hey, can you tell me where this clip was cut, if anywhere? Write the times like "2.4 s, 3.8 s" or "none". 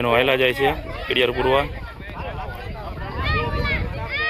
none

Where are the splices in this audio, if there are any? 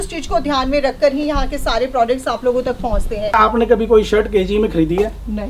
3.3 s

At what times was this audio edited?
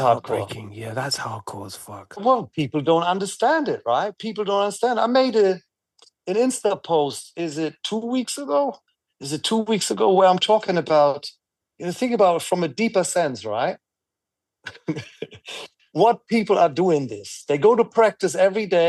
2.2 s

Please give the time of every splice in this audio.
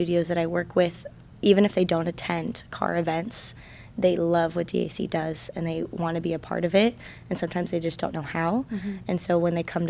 none

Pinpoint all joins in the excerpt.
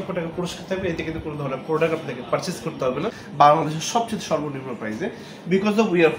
3.2 s

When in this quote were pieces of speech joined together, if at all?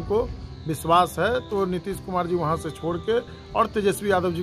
none

